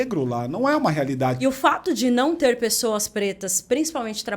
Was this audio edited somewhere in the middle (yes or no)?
yes